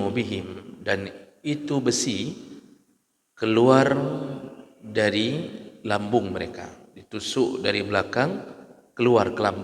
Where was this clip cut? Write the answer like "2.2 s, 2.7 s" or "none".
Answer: none